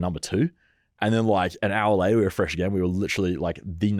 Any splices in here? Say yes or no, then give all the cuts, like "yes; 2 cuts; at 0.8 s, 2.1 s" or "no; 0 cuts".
no; 0 cuts